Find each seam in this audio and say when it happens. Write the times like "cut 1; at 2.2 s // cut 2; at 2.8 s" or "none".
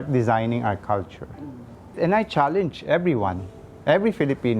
cut 1; at 2.0 s